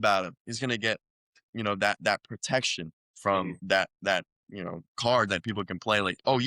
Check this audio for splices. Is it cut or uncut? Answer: cut